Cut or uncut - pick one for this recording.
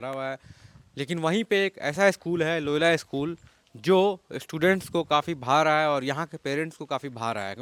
uncut